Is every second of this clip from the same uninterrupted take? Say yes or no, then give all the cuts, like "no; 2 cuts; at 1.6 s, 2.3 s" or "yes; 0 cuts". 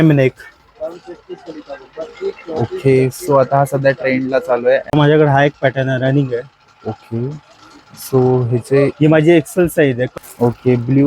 no; 2 cuts; at 4.8 s, 10.0 s